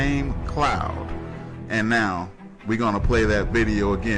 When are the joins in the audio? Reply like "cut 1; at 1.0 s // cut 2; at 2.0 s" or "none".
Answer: none